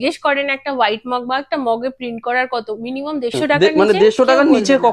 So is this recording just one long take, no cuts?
no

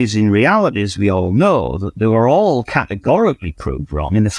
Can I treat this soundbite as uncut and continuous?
yes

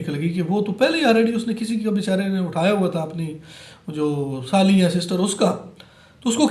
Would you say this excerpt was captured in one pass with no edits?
yes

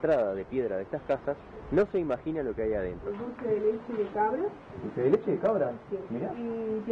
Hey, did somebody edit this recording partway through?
yes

